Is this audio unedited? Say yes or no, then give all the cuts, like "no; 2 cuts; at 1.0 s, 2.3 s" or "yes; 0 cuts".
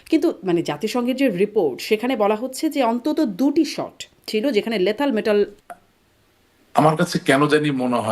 no; 1 cut; at 5.5 s